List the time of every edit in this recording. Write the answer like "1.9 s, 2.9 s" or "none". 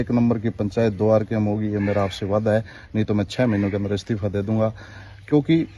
none